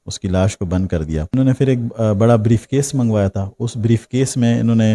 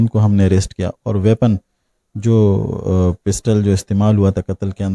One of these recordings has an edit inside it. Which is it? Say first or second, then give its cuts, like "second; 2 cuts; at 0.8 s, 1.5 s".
first; 1 cut; at 1.3 s